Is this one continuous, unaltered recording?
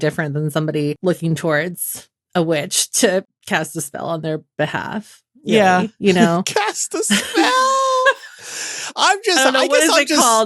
no; 2 cuts; at 1.0 s, 3.4 s

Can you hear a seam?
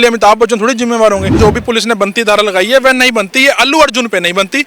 yes; 1 cut; at 1.4 s

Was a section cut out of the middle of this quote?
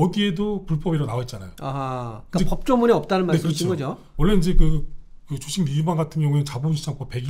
no; 0 cuts

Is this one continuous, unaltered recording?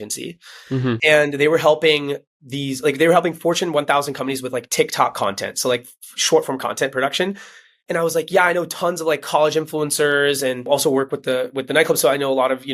no; 1 cut; at 10.7 s

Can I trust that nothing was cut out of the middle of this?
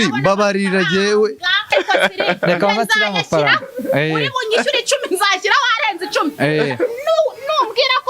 no; 1 cut; at 1.6 s

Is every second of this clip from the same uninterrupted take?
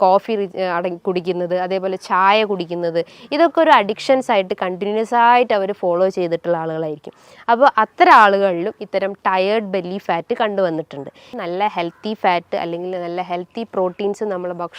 no; 1 cut; at 11.3 s

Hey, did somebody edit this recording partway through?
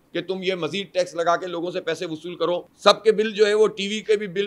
yes; 1 cut; at 2.7 s

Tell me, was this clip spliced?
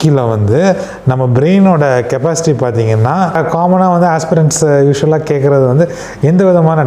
yes; 1 cut; at 3.4 s

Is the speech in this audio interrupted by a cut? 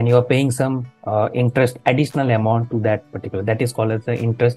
no; 0 cuts

